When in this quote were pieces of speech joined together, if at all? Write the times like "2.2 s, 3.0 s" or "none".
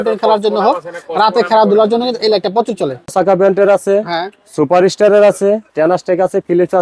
3.1 s